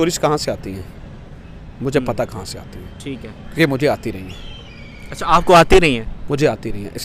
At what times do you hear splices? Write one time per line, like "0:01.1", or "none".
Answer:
none